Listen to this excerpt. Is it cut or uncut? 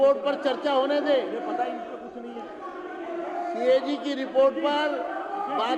uncut